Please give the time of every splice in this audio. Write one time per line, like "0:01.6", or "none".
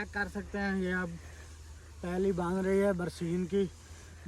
none